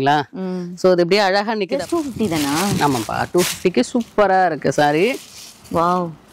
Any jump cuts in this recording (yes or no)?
yes